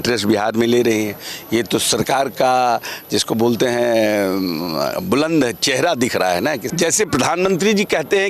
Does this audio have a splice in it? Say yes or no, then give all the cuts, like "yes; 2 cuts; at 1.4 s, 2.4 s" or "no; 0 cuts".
yes; 1 cut; at 6.6 s